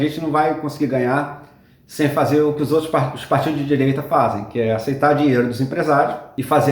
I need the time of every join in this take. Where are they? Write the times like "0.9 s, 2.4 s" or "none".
none